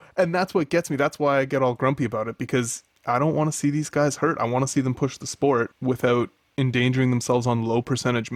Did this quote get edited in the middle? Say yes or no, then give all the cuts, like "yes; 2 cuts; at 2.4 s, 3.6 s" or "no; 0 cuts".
yes; 1 cut; at 5.7 s